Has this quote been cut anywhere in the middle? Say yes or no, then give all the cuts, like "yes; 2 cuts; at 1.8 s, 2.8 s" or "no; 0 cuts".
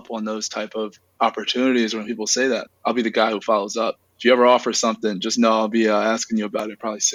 no; 0 cuts